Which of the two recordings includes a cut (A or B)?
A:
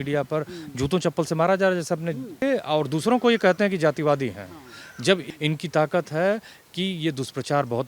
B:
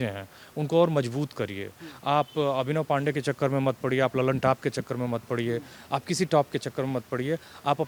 A